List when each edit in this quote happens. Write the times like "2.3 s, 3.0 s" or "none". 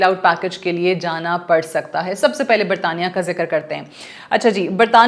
none